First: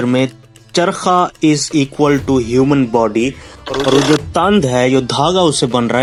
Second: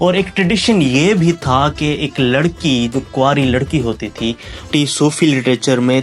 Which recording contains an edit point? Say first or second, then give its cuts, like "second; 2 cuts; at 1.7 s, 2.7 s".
second; 1 cut; at 4.7 s